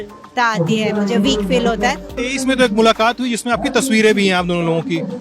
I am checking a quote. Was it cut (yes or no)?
yes